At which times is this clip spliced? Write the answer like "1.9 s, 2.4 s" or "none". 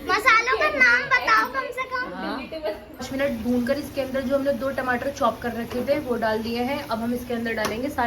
2.9 s